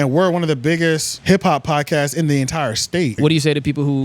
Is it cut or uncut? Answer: cut